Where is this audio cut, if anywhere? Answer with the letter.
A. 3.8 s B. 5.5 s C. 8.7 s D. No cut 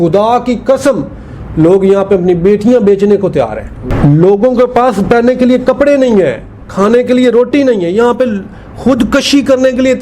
A